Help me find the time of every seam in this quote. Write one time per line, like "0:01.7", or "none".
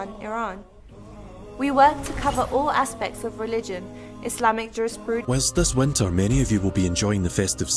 0:05.2

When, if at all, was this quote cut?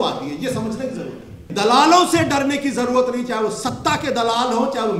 0:01.5

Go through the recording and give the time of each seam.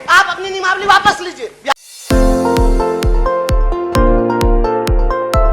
0:01.7

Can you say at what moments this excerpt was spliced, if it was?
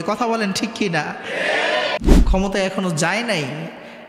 0:02.0

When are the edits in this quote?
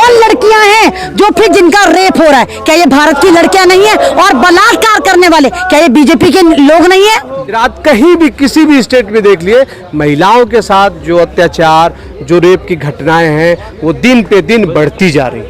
0:07.6

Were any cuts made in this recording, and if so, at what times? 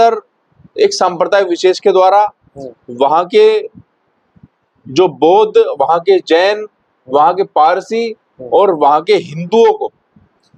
none

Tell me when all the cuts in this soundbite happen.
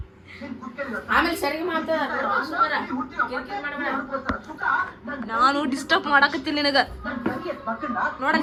none

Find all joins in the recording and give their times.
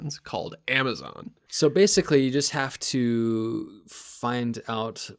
0:01.4

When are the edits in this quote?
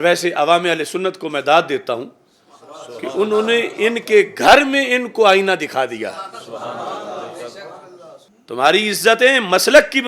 0:08.2

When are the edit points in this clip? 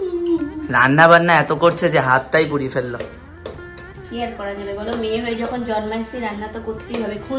none

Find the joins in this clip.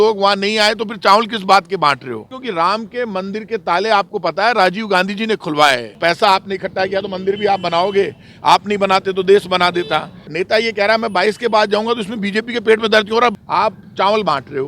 0:02.3
0:05.9
0:10.2
0:13.3

